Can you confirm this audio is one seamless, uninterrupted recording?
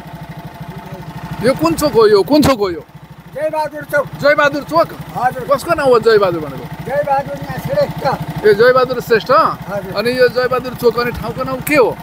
yes; 0 cuts

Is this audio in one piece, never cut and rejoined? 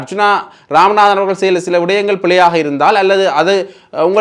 yes; 0 cuts

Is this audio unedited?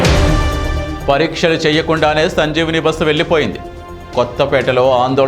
no; 1 cut; at 0.9 s

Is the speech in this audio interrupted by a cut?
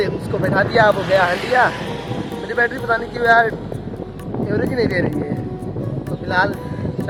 no; 0 cuts

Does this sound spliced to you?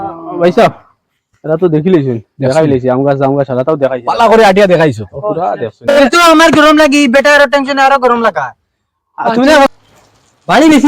yes; 2 cuts; at 5.8 s, 9.7 s

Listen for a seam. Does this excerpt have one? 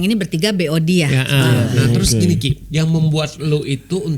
yes; 1 cut; at 1.7 s

